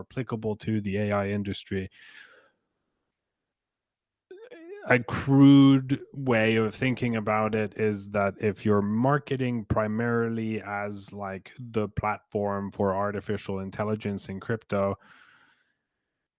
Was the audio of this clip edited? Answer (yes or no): no